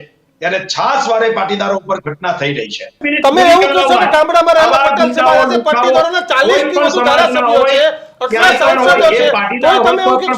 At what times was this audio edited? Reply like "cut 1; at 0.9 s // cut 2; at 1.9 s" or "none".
cut 1; at 3.0 s